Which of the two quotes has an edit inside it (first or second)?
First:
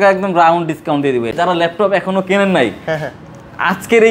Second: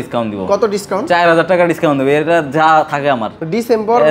first